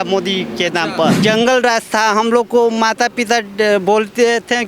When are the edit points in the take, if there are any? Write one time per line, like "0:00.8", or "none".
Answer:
0:01.2